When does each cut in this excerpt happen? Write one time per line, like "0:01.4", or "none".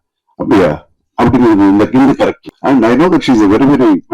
0:02.4